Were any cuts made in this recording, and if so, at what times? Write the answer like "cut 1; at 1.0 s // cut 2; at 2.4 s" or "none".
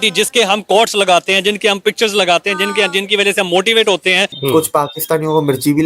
cut 1; at 4.3 s